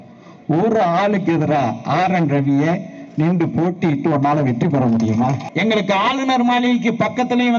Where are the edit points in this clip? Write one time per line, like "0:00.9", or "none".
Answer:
0:05.4